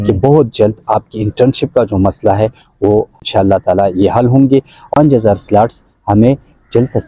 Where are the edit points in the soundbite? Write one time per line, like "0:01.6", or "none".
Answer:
0:03.2
0:04.9